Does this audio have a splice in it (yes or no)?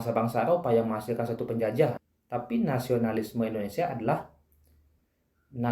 yes